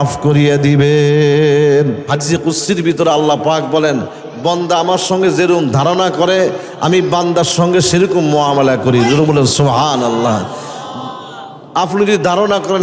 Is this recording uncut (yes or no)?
no